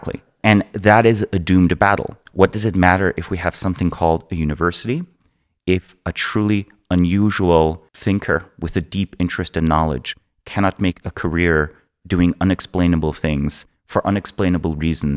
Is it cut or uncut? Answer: cut